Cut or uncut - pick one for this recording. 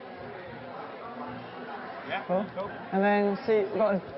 cut